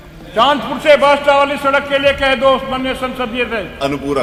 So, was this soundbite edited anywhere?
no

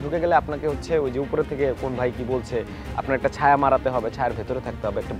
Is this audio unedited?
yes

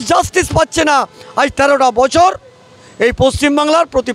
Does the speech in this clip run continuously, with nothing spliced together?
yes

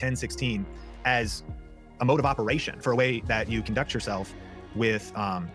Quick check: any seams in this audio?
no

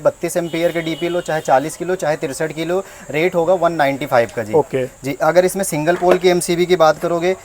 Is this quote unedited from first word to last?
yes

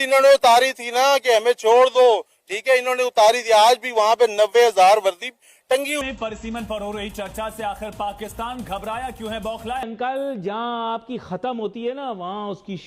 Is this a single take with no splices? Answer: no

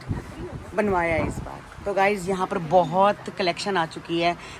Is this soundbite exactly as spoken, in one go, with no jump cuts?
yes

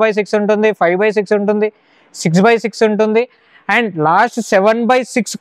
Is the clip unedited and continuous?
yes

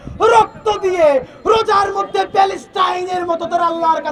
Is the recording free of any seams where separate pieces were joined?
yes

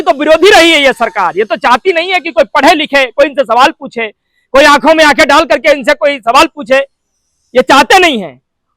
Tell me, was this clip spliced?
no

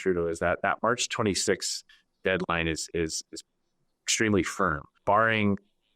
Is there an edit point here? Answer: yes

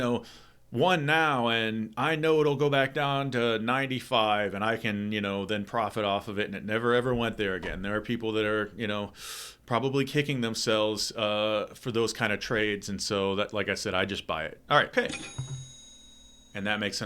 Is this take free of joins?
no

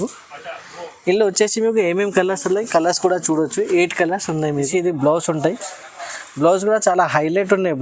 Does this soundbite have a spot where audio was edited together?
yes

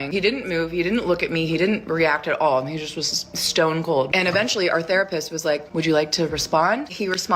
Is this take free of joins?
yes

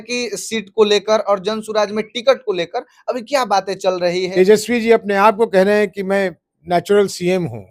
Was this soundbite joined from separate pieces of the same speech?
yes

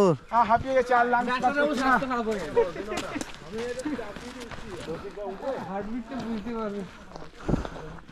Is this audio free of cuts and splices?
yes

